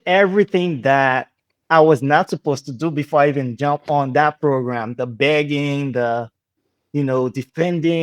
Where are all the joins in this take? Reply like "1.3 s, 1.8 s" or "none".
none